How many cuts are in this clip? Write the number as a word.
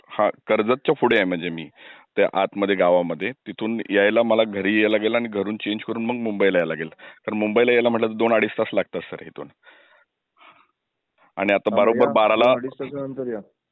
one